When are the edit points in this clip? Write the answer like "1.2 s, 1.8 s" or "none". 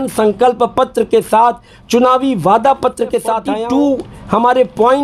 3.5 s